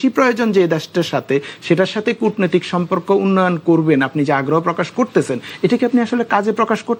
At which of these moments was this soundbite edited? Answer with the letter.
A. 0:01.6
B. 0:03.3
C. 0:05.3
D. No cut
D